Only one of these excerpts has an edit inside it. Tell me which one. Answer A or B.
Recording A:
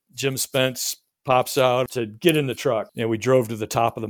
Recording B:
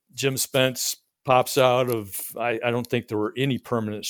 A